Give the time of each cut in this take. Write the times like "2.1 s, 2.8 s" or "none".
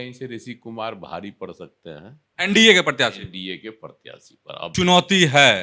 2.2 s, 4.7 s